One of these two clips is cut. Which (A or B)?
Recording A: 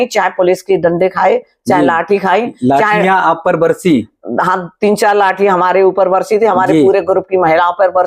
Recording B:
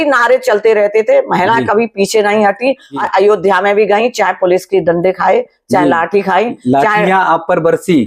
B